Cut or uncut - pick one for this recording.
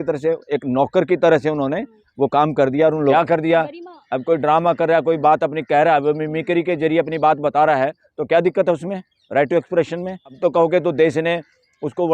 cut